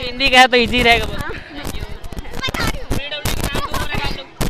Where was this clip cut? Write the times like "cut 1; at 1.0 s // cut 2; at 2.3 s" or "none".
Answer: cut 1; at 2.4 s